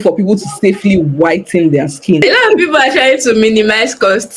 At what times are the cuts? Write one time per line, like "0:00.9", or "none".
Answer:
0:02.2